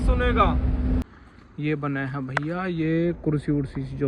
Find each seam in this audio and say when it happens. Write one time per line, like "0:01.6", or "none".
0:01.0